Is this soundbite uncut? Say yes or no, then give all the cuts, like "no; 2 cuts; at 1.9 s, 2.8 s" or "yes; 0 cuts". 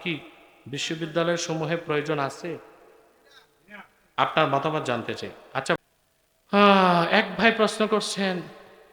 no; 1 cut; at 5.8 s